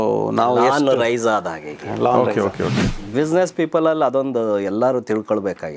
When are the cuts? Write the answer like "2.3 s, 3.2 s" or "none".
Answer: 2.8 s